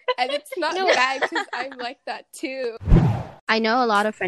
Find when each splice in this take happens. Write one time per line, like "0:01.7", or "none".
0:03.0

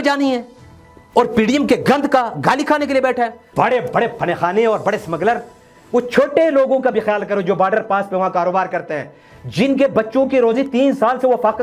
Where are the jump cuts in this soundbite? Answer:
0:03.4

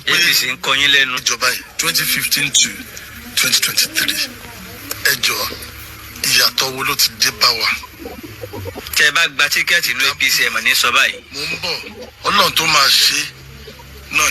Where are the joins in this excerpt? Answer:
0:01.2

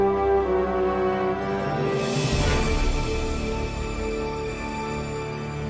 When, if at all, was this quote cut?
none

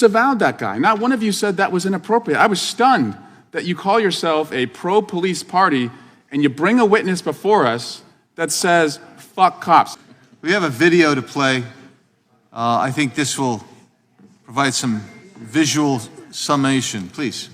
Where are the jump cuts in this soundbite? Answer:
0:09.9

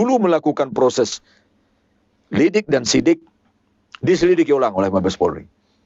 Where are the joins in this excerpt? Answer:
none

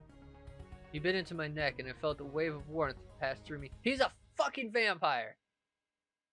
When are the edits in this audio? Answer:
0:00.9

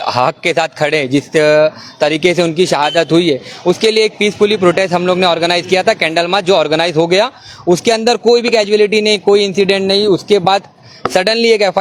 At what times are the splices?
none

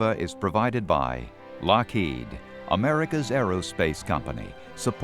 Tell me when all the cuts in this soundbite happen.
0:01.5

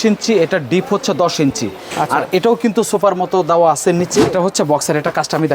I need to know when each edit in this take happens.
0:04.2

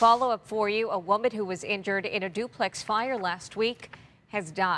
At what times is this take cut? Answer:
none

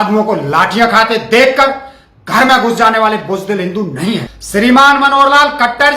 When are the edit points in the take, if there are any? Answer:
0:04.3

